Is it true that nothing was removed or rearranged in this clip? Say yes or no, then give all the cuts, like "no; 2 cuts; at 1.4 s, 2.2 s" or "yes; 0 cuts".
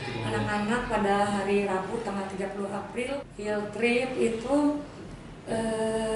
no; 1 cut; at 3.3 s